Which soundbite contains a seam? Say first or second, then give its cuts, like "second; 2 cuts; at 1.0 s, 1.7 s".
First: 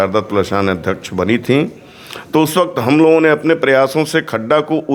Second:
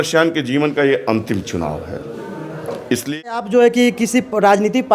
second; 1 cut; at 3.4 s